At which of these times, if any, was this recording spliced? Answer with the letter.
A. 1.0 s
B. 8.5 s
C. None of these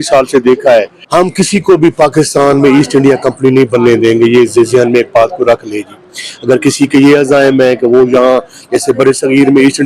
A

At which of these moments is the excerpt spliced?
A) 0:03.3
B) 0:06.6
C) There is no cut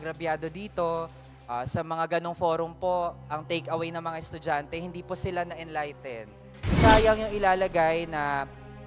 B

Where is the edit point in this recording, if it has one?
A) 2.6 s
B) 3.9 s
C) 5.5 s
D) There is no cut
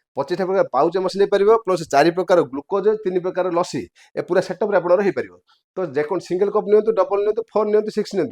D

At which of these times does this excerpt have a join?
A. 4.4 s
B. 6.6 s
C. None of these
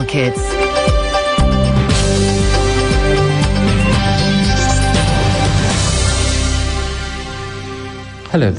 B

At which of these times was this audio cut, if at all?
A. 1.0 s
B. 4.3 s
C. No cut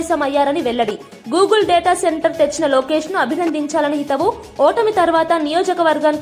C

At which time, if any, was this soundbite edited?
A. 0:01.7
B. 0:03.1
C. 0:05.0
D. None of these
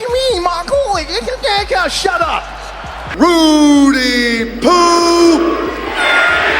D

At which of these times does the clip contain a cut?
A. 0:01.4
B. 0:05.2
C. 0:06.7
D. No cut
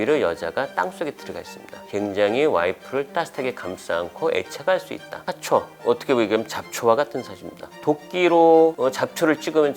B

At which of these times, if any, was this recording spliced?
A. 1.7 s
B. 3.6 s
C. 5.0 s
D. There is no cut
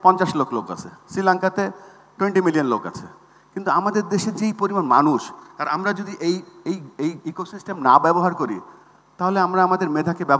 D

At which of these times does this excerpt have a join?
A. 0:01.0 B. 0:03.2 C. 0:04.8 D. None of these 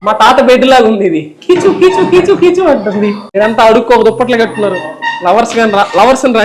B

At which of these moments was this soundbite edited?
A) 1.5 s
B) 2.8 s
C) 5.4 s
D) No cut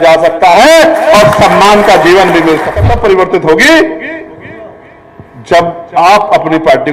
B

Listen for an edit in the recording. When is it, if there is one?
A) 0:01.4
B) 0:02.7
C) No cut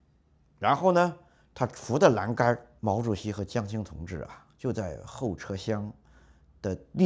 B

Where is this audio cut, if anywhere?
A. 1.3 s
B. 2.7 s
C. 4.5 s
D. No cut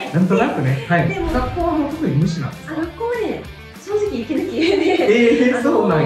A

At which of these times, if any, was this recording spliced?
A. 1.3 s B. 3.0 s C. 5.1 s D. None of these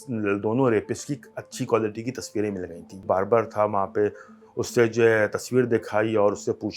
B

